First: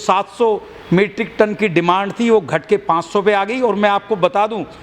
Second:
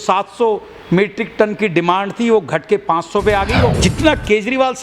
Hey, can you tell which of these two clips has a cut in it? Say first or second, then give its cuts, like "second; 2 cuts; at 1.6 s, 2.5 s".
second; 1 cut; at 3.7 s